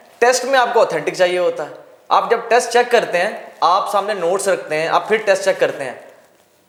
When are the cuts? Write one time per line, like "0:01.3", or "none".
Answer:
none